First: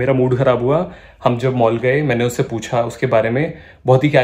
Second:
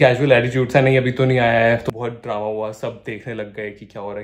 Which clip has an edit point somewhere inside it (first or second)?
second